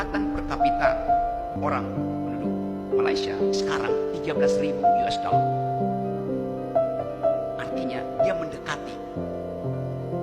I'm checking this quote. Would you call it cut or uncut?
cut